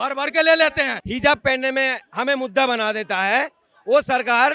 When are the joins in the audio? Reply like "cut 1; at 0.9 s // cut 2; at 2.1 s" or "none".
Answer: cut 1; at 1.0 s